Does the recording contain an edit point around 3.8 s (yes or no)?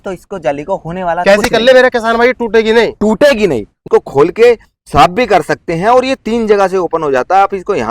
yes